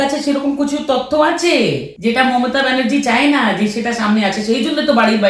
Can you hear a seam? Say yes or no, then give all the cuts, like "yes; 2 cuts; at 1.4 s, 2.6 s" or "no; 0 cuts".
yes; 1 cut; at 1.9 s